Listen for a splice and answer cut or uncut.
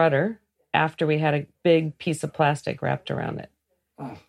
cut